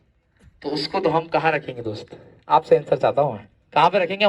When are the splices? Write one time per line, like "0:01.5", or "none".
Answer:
none